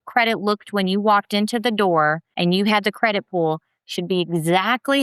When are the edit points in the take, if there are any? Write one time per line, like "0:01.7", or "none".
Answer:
0:02.3